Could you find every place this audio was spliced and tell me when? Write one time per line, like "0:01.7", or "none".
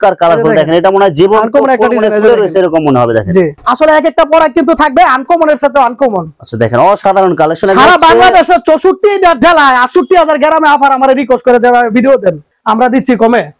0:03.5
0:12.5